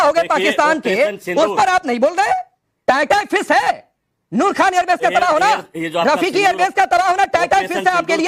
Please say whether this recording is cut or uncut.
uncut